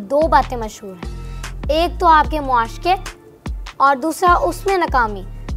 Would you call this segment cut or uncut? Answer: uncut